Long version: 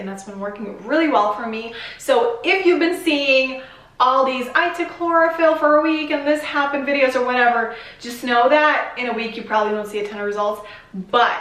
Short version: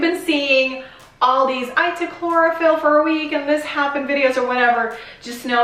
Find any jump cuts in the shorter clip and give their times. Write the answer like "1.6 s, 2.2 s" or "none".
none